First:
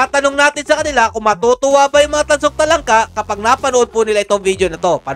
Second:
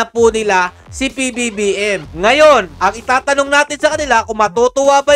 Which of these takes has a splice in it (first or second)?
second